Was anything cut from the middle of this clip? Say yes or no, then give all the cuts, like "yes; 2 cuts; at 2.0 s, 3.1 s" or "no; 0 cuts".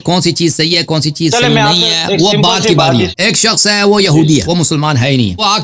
yes; 1 cut; at 3.2 s